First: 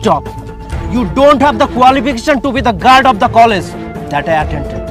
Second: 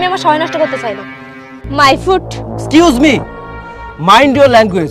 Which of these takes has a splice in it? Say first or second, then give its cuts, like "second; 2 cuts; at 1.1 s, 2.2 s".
second; 1 cut; at 1.7 s